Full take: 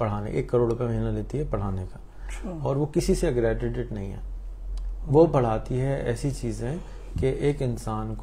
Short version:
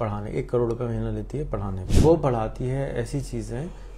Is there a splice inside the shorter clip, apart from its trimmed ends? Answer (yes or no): yes